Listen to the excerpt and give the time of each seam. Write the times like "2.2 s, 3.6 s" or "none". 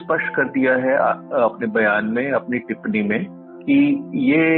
none